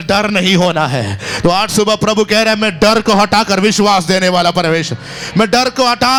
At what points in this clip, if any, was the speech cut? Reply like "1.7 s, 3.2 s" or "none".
none